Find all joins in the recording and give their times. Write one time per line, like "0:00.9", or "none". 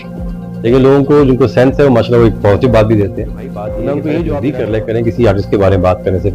0:04.4